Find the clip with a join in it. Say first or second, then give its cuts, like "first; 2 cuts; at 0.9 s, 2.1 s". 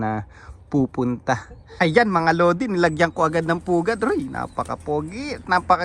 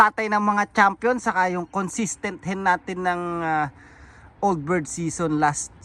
first; 1 cut; at 1.6 s